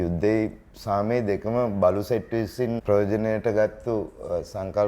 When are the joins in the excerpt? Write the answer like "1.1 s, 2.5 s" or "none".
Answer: 2.8 s